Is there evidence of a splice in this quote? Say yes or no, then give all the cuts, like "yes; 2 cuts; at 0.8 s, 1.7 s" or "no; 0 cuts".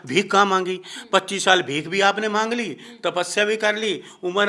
no; 0 cuts